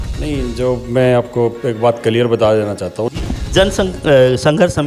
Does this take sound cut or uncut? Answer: cut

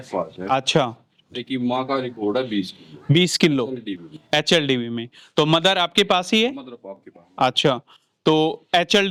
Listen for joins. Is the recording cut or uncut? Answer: uncut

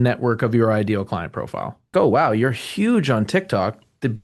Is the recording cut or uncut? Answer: cut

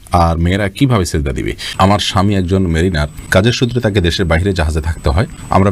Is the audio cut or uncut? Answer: cut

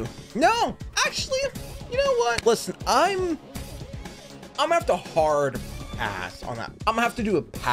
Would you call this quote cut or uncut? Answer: cut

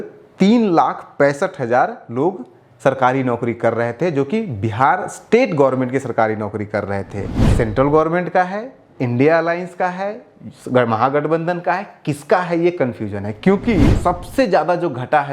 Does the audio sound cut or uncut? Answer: cut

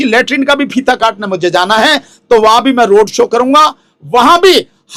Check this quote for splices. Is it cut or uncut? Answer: uncut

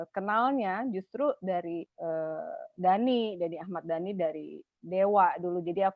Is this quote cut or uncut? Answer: cut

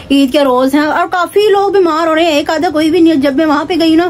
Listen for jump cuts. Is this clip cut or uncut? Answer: uncut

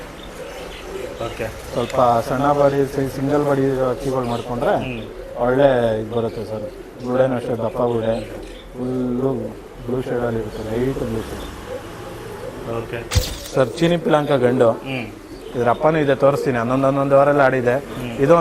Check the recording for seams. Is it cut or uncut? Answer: cut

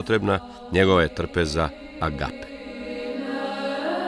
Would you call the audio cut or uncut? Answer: cut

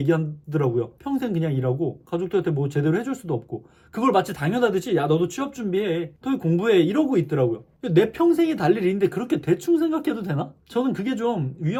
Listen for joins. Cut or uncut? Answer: uncut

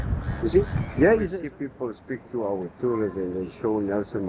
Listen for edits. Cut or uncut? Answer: cut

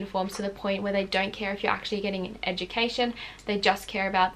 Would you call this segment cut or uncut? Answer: uncut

